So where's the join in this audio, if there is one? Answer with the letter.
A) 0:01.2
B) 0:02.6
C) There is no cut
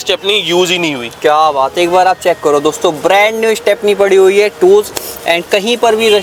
C